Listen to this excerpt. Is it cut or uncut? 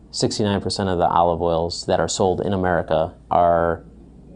cut